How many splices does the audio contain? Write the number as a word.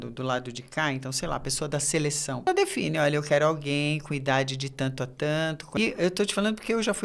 two